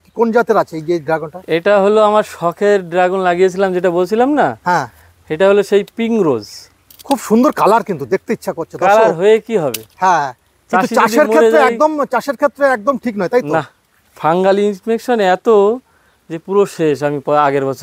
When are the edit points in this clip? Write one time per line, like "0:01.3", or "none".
none